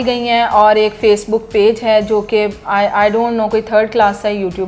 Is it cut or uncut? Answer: uncut